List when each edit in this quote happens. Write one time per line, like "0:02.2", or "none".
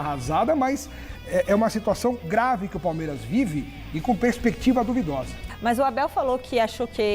0:05.5